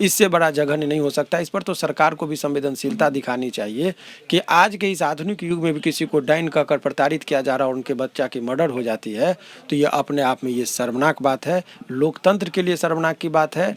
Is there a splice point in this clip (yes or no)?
no